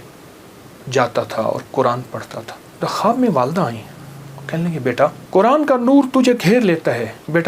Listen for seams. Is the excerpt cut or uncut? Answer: cut